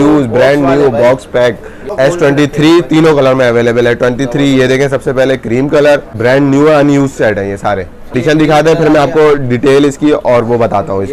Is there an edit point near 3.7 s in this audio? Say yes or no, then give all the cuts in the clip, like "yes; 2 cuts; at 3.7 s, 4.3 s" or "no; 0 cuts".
no; 3 cuts; at 1.9 s, 6.2 s, 8.1 s